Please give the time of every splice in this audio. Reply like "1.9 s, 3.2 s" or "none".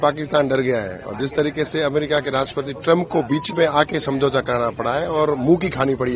none